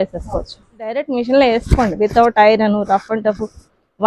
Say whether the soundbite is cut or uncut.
cut